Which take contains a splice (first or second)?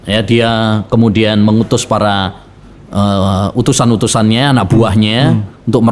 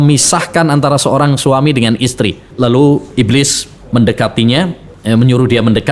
second